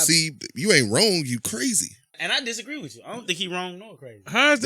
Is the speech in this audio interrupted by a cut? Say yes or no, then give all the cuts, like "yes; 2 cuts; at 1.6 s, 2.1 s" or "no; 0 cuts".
yes; 1 cut; at 2.2 s